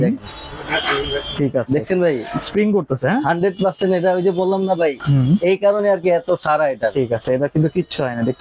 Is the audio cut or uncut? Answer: uncut